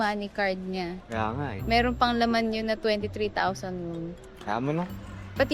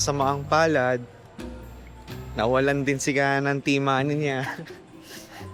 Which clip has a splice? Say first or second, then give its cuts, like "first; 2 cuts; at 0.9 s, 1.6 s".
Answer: first; 2 cuts; at 1.0 s, 4.3 s